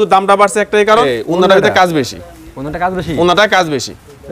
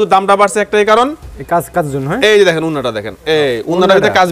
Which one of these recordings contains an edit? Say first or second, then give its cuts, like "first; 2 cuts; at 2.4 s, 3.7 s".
first; 1 cut; at 1.0 s